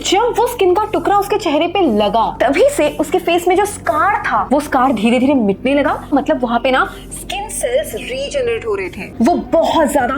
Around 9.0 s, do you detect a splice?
yes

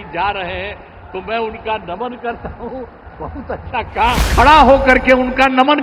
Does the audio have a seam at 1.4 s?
no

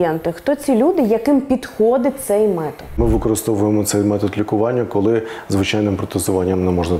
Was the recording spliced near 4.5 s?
no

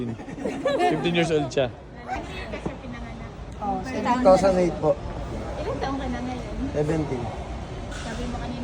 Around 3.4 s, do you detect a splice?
no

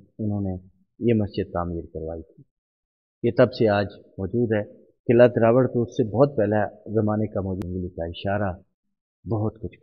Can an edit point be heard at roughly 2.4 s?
no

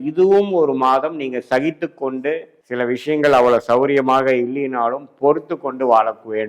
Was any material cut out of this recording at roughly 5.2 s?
no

